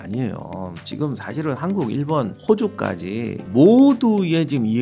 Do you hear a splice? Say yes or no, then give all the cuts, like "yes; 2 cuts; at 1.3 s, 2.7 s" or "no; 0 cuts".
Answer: yes; 2 cuts; at 2.4 s, 3.4 s